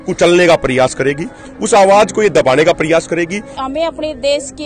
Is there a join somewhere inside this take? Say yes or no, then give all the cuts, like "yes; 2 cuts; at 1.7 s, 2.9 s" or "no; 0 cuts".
yes; 1 cut; at 3.6 s